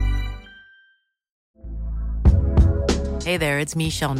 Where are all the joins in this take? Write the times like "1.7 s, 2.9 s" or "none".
1.5 s